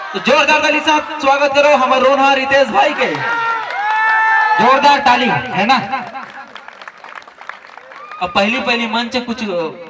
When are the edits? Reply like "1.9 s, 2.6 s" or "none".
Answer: none